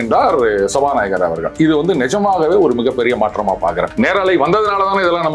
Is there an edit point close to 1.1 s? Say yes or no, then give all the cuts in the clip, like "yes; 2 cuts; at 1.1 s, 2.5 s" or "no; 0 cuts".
no; 1 cut; at 3.9 s